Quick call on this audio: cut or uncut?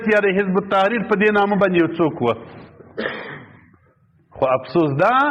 uncut